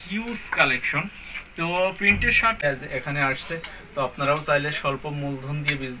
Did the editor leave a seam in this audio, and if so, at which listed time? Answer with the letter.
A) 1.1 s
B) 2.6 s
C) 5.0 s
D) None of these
B